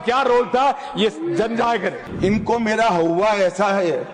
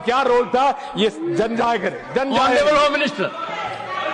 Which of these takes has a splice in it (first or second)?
first